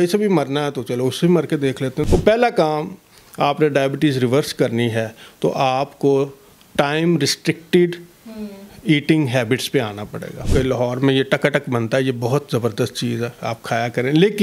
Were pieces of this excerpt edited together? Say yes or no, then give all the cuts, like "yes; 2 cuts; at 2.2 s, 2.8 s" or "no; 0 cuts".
yes; 2 cuts; at 2.1 s, 10.5 s